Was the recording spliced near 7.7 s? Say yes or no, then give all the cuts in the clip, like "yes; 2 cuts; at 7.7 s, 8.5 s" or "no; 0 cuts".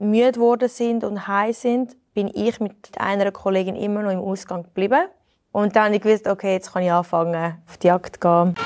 yes; 2 cuts; at 2.9 s, 7.7 s